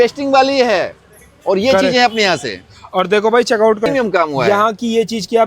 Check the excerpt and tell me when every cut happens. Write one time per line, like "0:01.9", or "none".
0:03.9